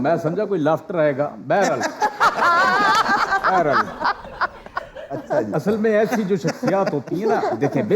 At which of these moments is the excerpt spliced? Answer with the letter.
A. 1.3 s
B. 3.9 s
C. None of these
C